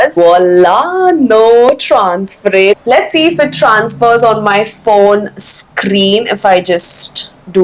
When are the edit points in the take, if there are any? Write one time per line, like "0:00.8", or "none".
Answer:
0:02.8